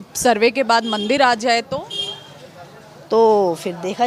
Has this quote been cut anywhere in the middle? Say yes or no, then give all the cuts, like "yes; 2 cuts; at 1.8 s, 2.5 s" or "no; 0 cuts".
no; 0 cuts